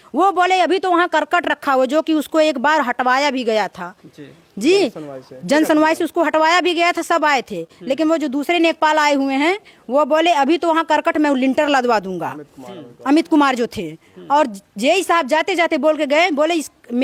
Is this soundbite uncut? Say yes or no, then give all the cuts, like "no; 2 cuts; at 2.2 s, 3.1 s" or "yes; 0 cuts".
yes; 0 cuts